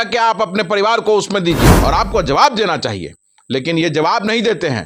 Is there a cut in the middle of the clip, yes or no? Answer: yes